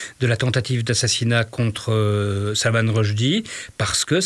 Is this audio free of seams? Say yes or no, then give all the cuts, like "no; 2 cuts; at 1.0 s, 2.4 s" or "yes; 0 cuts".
yes; 0 cuts